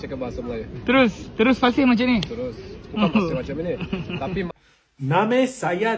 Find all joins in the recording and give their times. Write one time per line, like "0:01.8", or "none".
0:04.5